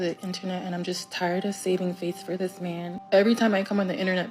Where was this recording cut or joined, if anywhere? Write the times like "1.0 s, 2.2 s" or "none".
2.9 s